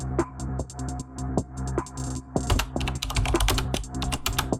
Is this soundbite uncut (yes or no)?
yes